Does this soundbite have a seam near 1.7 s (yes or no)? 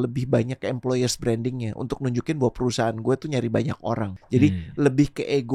no